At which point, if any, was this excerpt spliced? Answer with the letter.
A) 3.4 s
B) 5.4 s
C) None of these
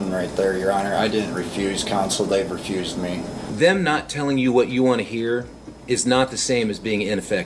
A